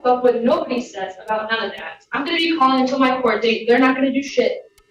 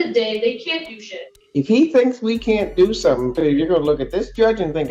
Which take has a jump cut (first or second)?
second